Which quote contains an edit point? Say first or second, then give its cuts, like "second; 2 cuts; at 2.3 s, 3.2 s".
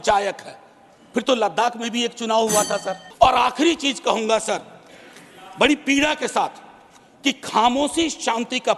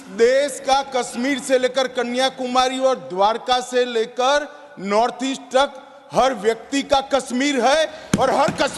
first; 1 cut; at 3.0 s